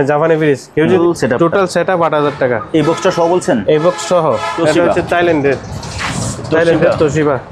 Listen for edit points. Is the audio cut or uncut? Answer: cut